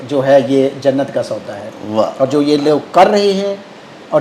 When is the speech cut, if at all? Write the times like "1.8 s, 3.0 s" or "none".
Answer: none